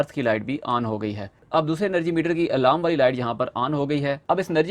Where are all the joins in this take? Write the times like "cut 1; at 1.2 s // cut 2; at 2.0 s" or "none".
cut 1; at 1.4 s